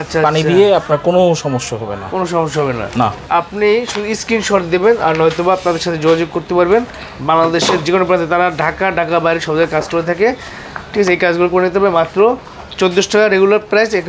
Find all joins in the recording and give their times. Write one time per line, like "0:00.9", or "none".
none